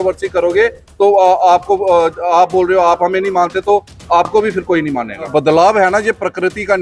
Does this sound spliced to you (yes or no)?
yes